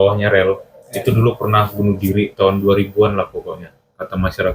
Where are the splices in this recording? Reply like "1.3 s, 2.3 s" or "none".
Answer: none